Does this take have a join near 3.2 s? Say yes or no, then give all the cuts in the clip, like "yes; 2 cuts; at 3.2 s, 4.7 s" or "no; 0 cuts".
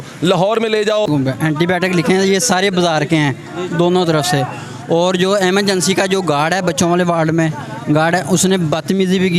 no; 1 cut; at 1.1 s